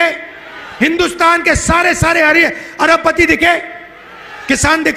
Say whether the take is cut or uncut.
uncut